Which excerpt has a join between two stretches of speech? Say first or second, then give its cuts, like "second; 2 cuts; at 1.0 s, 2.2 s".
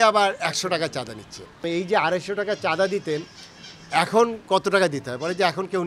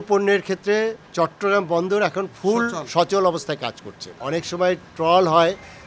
first; 1 cut; at 1.7 s